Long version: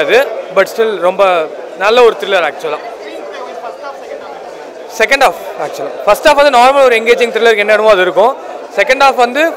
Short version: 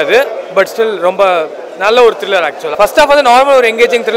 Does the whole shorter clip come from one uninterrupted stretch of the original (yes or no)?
no